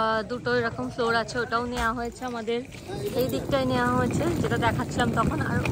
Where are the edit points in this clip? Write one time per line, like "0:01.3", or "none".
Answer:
none